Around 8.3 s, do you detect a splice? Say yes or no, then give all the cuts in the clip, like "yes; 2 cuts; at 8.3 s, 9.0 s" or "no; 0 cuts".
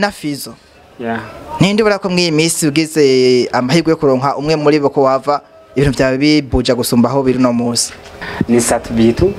yes; 1 cut; at 8.3 s